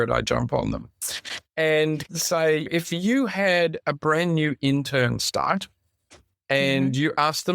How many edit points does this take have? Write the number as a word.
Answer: zero